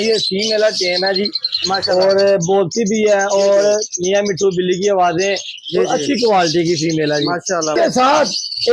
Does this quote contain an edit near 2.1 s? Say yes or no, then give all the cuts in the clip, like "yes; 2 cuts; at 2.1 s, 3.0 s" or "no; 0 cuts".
no; 1 cut; at 7.8 s